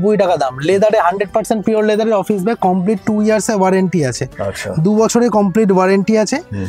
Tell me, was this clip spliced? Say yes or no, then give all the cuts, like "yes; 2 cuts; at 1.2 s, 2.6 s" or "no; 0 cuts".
no; 0 cuts